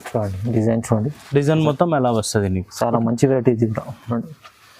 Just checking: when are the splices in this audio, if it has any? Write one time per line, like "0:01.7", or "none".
none